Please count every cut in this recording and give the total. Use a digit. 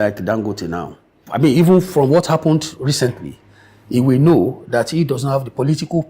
1